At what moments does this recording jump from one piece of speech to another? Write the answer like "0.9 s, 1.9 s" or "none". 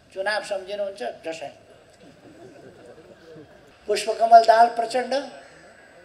3.7 s

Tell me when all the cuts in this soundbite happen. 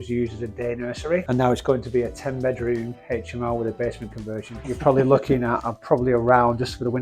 1.2 s, 4.6 s

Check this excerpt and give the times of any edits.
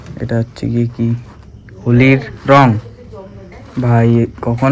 none

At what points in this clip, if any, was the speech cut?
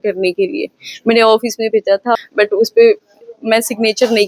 2.2 s

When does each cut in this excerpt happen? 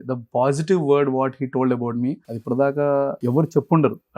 2.3 s, 3.2 s

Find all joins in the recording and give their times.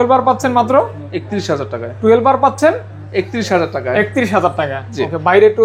none

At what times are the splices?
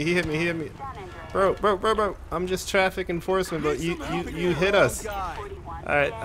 none

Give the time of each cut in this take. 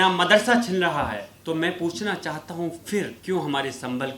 1.3 s, 3.2 s

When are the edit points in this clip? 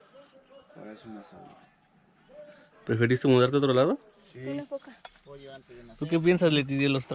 4.6 s

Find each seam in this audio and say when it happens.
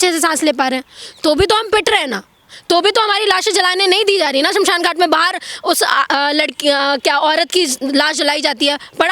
none

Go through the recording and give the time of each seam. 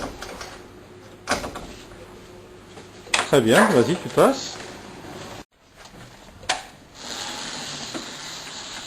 5.4 s

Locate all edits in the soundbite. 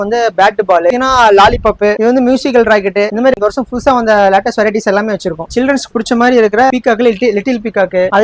0.9 s, 3.3 s

